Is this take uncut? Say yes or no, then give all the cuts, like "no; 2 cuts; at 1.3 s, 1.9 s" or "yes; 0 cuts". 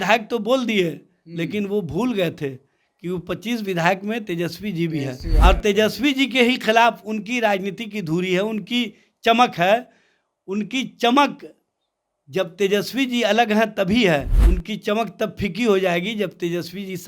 no; 2 cuts; at 5.3 s, 14.4 s